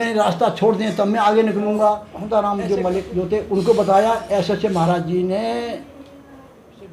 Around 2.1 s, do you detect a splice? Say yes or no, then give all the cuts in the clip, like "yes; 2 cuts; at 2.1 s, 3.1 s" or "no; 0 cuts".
yes; 1 cut; at 2.1 s